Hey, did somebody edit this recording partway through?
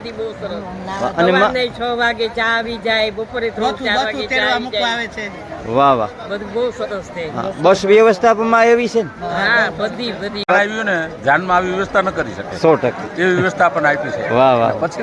yes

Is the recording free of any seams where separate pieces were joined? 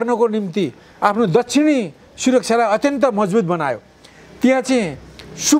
yes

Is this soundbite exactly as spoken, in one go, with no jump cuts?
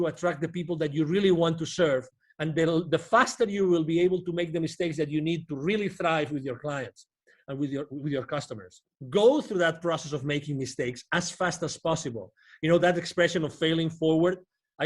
no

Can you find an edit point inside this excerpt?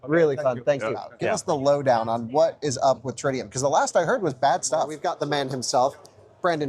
yes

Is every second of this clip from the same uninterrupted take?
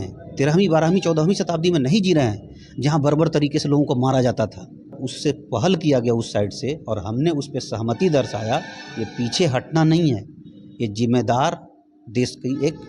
no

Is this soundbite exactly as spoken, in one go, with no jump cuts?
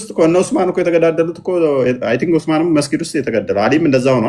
yes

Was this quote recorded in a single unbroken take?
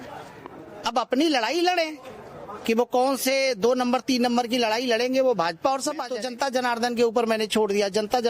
no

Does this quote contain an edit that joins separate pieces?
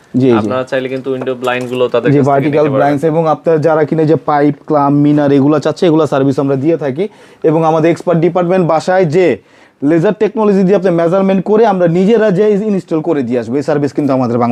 no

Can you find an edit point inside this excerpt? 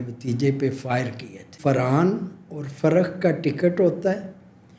yes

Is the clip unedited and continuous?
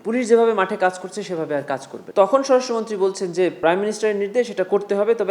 no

